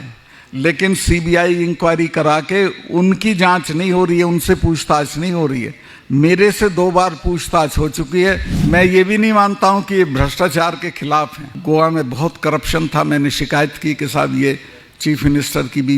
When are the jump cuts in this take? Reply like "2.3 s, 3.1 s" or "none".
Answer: 8.5 s, 11.5 s